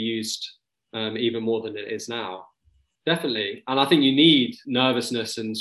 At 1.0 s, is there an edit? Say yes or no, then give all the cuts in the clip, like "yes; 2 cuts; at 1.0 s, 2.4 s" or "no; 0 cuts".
no; 2 cuts; at 2.7 s, 4.6 s